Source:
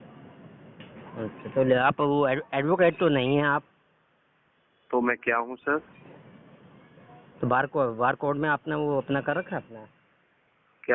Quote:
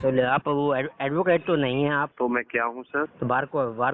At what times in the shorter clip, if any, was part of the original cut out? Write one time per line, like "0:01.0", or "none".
0:02.1
0:03.1

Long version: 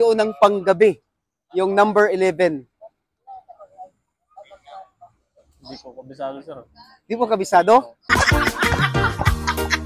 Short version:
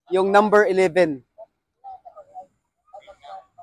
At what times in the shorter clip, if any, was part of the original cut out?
none

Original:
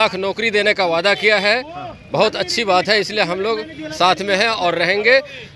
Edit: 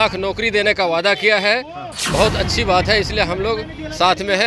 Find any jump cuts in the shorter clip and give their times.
none

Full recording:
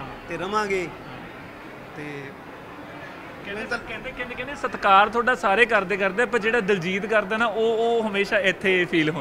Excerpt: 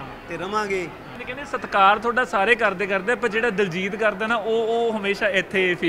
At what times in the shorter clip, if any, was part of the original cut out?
0:01.2

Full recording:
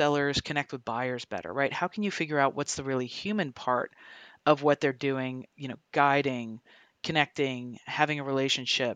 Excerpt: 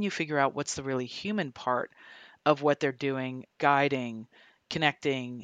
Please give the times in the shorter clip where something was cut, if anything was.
0:03.4

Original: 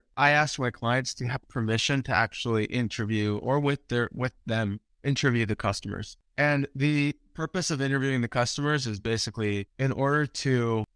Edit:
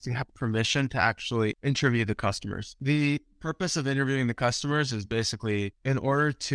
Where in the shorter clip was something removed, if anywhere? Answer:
0:01.6
0:02.8

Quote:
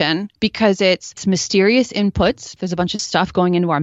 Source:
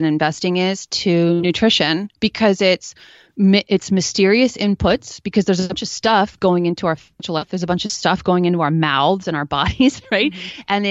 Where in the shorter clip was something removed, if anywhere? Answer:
0:01.2
0:02.5

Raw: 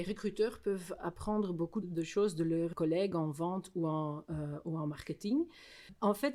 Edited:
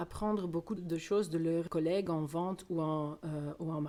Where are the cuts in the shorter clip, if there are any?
none

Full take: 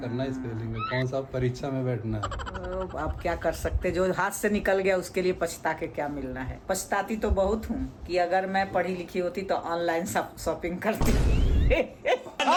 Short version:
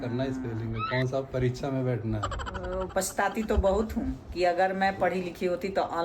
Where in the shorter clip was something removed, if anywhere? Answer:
0:02.9

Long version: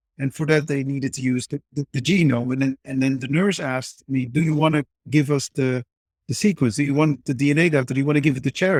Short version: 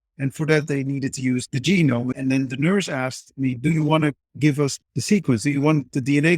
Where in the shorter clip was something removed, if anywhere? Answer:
0:01.5
0:02.1
0:04.8

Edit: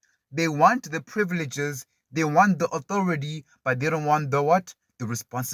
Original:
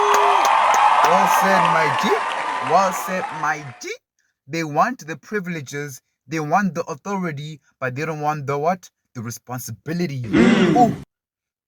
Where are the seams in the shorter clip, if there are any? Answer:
none

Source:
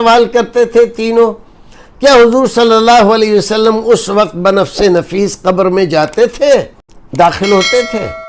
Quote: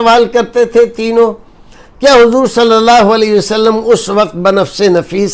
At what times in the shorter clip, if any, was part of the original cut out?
none

